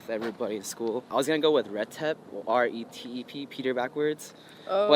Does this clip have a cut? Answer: yes; 1 cut; at 1.1 s

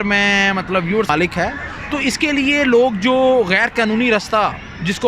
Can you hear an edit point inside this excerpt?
yes; 1 cut; at 1.1 s

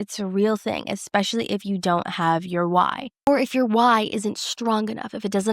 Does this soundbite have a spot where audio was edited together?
yes; 1 cut; at 3.3 s

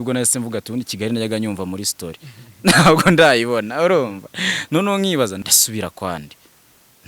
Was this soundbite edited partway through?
yes; 1 cut; at 5.4 s

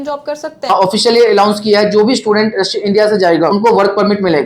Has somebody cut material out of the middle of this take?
yes; 2 cuts; at 0.7 s, 3.5 s

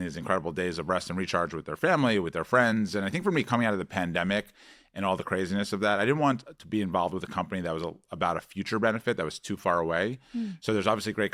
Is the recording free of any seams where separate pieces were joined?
yes; 0 cuts

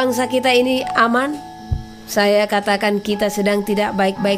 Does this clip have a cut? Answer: no; 0 cuts

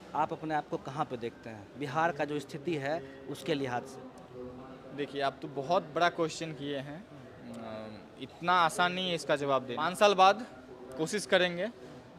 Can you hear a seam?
yes; 2 cuts; at 4.1 s, 9.7 s

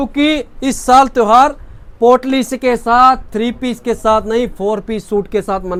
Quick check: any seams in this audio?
no; 0 cuts

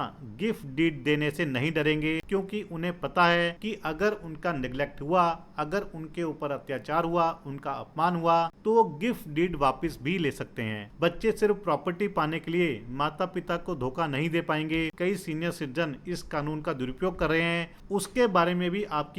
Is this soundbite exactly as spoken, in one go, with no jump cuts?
no; 6 cuts; at 2.2 s, 3.6 s, 8.6 s, 10.8 s, 14.9 s, 17.7 s

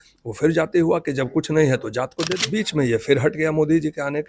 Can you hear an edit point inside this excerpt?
yes; 1 cut; at 2.4 s

